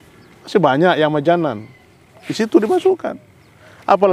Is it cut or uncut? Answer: uncut